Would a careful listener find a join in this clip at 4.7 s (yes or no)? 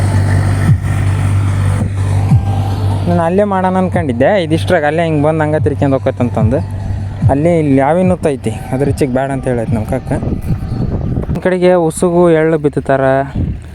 no